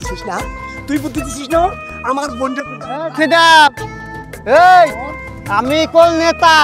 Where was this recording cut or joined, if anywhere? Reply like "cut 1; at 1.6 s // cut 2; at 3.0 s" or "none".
none